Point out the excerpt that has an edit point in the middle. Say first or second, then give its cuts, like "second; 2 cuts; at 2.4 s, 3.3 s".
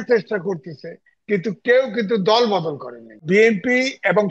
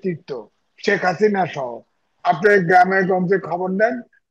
first; 1 cut; at 3.2 s